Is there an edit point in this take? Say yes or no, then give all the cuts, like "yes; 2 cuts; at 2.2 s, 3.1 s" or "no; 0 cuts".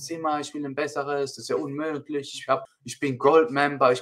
yes; 1 cut; at 2.6 s